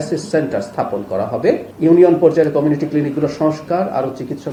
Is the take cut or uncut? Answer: uncut